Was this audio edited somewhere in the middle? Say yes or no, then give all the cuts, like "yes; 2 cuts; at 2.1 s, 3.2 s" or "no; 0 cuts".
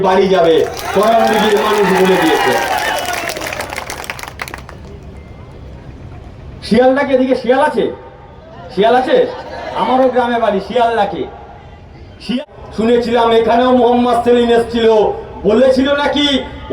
yes; 1 cut; at 12.5 s